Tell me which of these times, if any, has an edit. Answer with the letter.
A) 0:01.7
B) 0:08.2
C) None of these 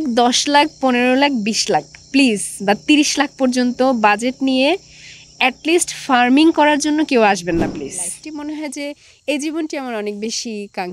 B